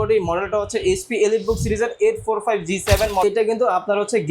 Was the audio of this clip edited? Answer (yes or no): yes